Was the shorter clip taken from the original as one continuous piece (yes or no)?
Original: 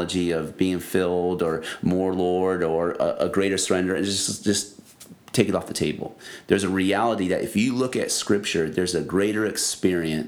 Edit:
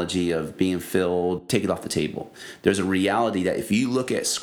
no